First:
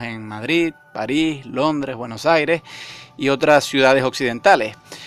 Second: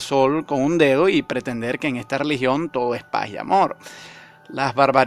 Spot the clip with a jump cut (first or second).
first